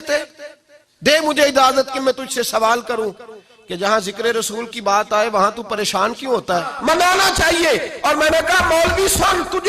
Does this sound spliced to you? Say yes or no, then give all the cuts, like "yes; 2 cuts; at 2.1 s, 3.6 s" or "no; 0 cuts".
yes; 1 cut; at 6.5 s